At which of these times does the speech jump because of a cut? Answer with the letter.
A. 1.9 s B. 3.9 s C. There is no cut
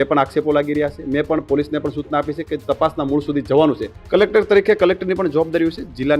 B